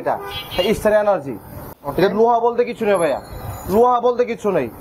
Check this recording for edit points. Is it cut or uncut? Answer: cut